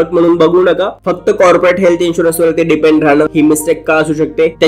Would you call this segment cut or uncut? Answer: cut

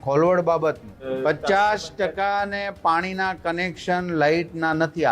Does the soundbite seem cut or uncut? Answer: cut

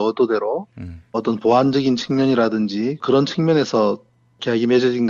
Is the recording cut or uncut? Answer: uncut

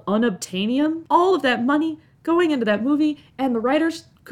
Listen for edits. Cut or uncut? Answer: cut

